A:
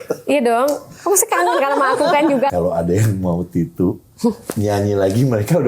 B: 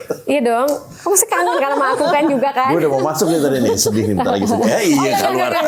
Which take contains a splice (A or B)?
A